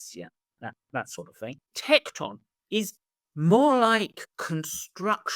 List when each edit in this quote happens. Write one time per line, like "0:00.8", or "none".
0:01.7